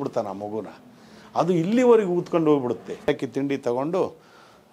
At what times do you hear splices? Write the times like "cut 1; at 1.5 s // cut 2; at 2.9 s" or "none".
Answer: cut 1; at 3.1 s

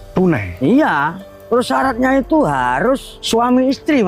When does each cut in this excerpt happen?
cut 1; at 3.1 s

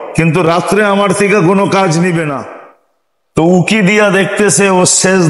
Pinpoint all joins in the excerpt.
cut 1; at 3.4 s

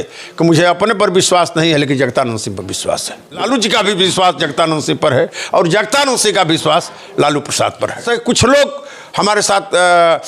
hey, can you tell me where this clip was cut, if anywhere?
cut 1; at 3.4 s // cut 2; at 8.0 s

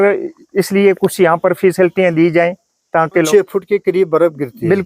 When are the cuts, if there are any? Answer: cut 1; at 3.3 s

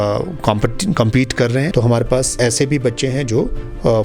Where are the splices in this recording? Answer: cut 1; at 1.7 s // cut 2; at 2.4 s

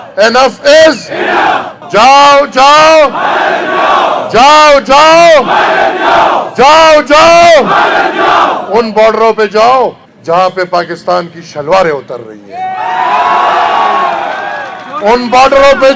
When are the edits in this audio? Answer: cut 1; at 1.7 s

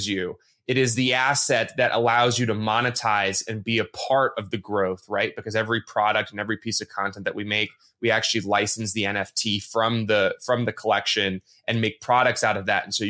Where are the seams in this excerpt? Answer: none

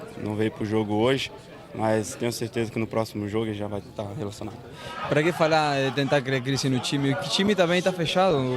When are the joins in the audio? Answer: cut 1; at 4.7 s

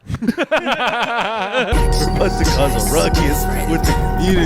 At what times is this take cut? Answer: cut 1; at 1.7 s

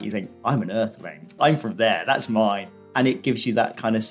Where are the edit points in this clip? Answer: cut 1; at 2.9 s

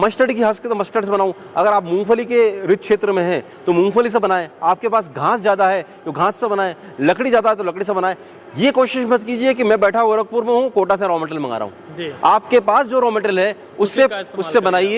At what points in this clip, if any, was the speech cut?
none

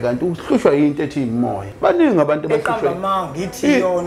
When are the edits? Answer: cut 1; at 1.6 s

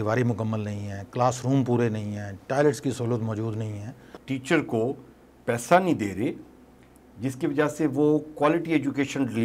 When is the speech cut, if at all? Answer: cut 1; at 4.1 s

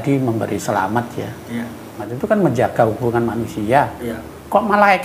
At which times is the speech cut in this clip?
cut 1; at 2.1 s

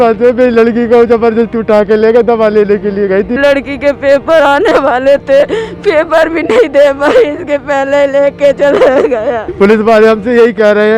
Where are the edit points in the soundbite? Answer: cut 1; at 3.3 s // cut 2; at 9.5 s

